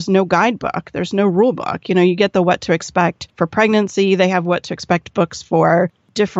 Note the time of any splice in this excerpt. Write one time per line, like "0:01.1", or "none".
0:03.2